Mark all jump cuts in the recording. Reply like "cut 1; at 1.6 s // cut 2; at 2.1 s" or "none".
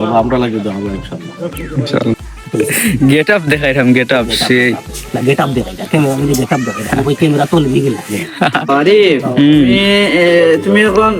cut 1; at 2.3 s // cut 2; at 8.7 s